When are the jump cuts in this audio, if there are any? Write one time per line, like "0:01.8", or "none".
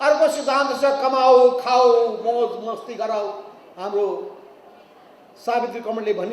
none